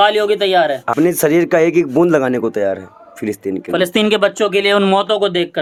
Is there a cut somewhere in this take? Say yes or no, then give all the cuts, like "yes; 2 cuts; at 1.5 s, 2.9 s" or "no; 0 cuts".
no; 0 cuts